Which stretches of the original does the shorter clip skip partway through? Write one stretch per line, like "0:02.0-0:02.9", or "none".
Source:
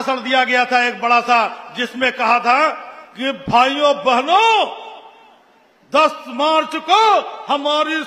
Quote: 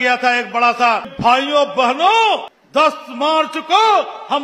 0:01.6-0:03.4
0:04.8-0:05.7